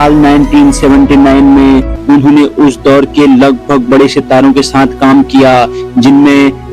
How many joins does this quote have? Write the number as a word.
one